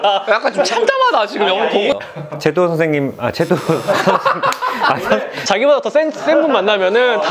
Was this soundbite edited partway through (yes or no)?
yes